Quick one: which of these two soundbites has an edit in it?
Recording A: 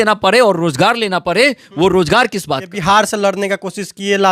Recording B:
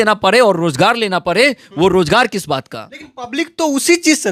A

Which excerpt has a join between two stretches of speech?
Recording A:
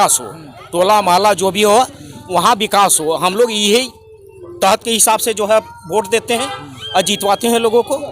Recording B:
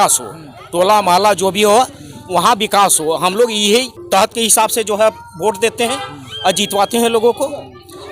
B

